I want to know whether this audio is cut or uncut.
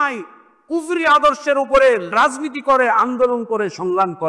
cut